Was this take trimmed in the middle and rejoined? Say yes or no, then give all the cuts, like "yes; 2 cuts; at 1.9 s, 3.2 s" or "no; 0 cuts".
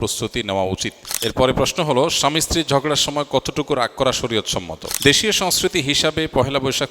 yes; 2 cuts; at 1.2 s, 4.9 s